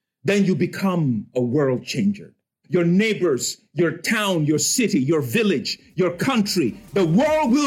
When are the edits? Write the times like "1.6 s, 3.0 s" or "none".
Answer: 2.6 s